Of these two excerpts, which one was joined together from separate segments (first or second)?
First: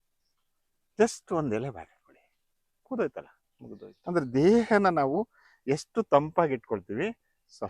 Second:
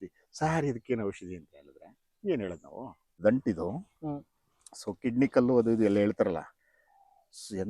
second